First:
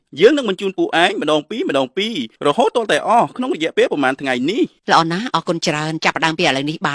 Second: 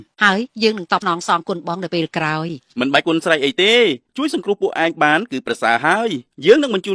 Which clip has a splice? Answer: second; 1 cut; at 1.0 s

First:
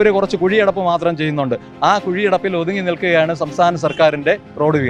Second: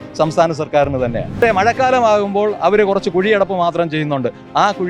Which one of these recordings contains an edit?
second; 1 cut; at 1.3 s

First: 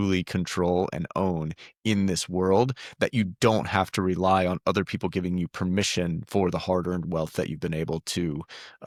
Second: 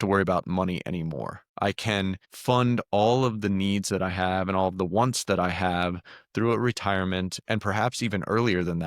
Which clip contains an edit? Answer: second; 2 cuts; at 1.4 s, 2.3 s

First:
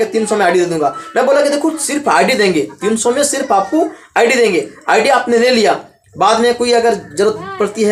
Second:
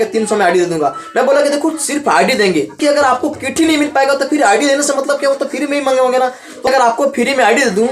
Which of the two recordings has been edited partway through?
second; 2 cuts; at 2.8 s, 6.6 s

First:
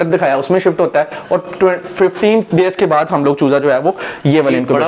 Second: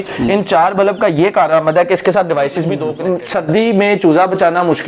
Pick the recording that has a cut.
second; 1 cut; at 2.9 s

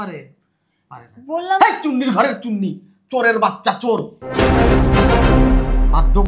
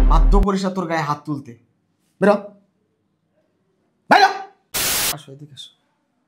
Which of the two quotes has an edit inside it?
second; 1 cut; at 5.1 s

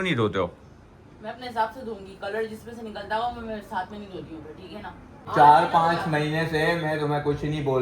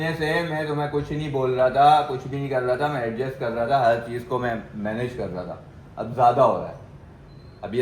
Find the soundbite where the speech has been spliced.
first; 1 cut; at 5.2 s

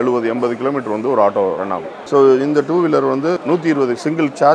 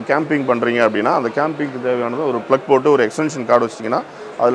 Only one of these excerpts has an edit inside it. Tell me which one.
first; 2 cuts; at 1.9 s, 3.4 s

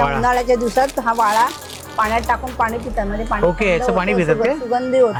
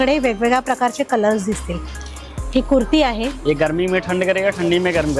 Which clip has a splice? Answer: second; 1 cut; at 3.4 s

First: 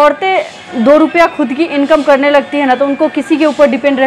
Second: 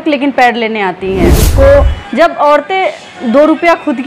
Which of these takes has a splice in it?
second; 1 cut; at 1.4 s

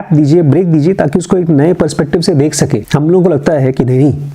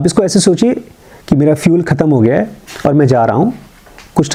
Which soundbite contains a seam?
first; 1 cut; at 2.8 s

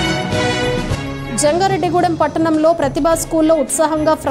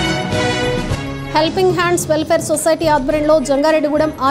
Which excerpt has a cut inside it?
first; 1 cut; at 1.0 s

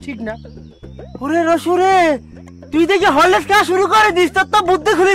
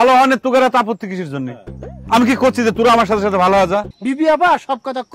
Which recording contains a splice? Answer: second; 1 cut; at 3.9 s

